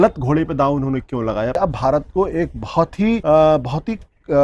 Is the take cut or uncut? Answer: cut